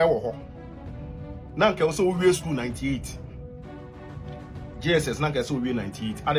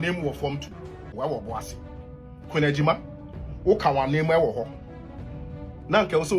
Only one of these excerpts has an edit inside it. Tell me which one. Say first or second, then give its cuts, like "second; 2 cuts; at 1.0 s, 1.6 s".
second; 1 cut; at 1.1 s